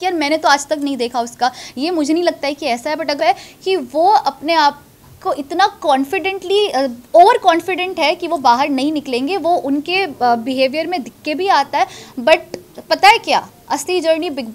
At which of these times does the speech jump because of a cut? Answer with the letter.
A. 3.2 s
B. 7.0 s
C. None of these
A